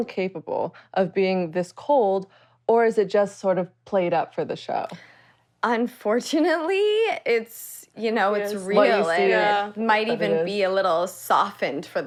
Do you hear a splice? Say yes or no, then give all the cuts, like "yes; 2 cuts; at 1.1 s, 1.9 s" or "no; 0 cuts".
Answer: no; 0 cuts